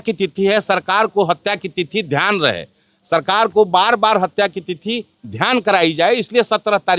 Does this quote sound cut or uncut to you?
uncut